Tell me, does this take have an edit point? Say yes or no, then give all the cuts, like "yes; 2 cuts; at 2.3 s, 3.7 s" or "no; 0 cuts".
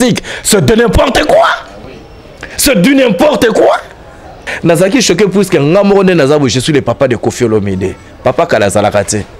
yes; 1 cut; at 4.5 s